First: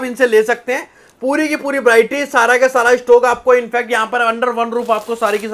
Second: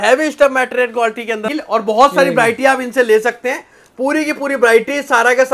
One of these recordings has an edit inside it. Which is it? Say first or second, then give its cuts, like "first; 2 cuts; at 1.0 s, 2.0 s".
second; 1 cut; at 1.4 s